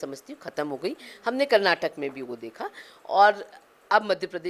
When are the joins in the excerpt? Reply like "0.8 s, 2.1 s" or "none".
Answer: none